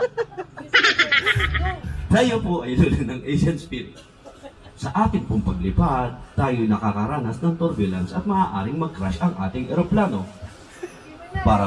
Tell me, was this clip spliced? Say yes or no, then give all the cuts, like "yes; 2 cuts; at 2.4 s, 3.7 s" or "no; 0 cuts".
no; 0 cuts